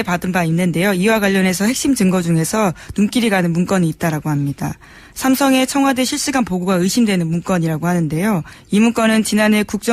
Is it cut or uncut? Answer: uncut